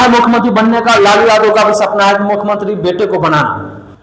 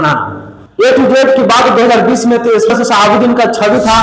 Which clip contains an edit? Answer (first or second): second